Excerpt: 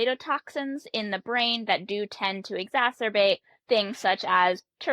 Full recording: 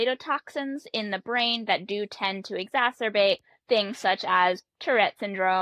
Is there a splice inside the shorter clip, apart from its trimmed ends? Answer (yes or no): no